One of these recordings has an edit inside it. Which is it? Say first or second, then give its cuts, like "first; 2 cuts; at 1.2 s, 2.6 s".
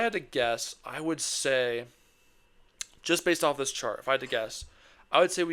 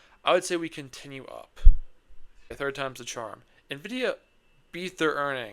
second; 1 cut; at 2.5 s